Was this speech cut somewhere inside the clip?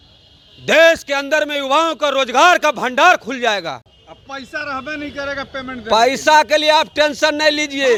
no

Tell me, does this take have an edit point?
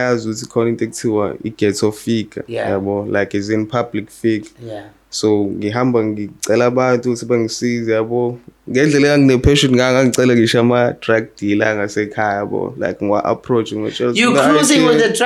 no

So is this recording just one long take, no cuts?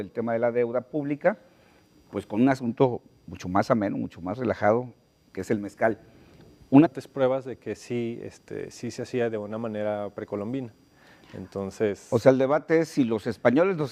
yes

